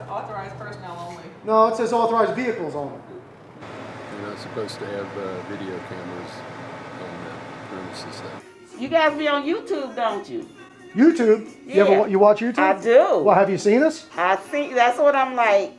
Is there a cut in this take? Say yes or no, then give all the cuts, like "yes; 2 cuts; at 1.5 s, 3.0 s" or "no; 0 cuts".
yes; 2 cuts; at 3.6 s, 8.4 s